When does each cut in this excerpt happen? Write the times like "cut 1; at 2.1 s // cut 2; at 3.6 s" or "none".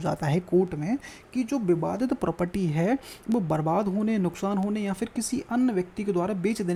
none